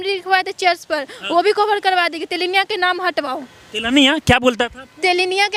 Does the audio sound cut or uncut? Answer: uncut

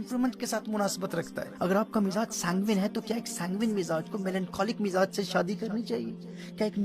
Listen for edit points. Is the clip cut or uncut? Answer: cut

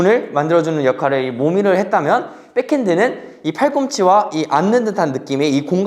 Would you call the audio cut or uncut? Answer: uncut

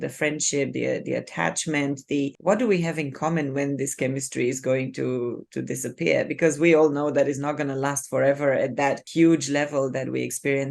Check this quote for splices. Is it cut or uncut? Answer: cut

